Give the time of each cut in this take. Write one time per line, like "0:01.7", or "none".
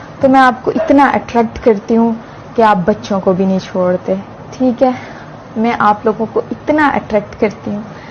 none